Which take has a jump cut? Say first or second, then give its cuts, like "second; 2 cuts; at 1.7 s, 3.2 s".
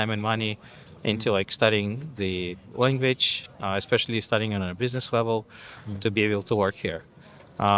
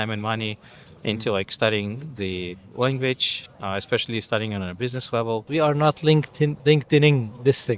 second; 2 cuts; at 5.4 s, 6.6 s